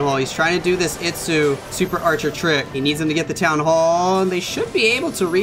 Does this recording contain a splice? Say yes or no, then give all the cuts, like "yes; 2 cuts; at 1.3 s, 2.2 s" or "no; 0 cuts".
yes; 2 cuts; at 1.7 s, 2.7 s